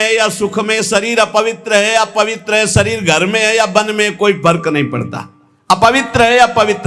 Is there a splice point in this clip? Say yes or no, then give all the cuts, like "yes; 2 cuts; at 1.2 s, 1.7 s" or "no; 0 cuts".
no; 0 cuts